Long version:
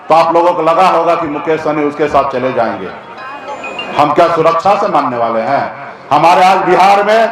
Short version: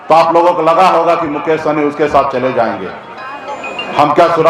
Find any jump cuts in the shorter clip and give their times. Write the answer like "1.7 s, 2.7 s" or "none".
none